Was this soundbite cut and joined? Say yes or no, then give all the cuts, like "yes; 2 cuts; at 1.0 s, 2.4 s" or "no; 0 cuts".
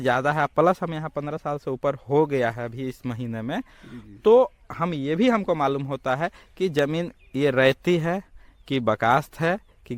no; 0 cuts